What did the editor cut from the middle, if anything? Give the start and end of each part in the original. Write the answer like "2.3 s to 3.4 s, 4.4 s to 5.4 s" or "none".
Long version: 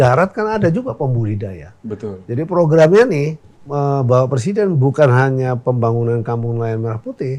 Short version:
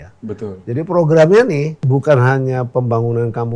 3.5 s to 4.8 s